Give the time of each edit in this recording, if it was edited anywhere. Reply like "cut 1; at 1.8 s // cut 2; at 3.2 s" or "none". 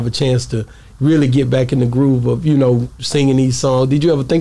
none